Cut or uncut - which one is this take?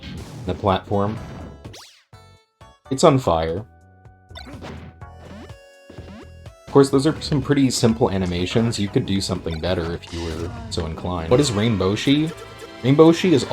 cut